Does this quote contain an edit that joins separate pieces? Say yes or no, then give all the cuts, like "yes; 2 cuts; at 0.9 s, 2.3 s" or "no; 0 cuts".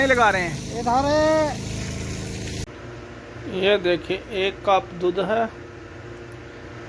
yes; 1 cut; at 2.6 s